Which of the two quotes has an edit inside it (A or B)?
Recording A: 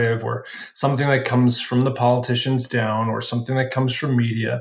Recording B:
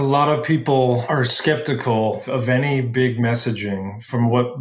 B